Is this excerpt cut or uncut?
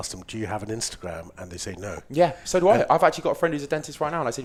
uncut